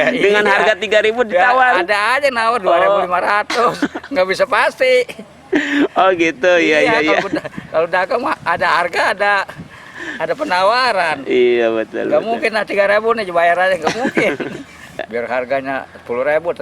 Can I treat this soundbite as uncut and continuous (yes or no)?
no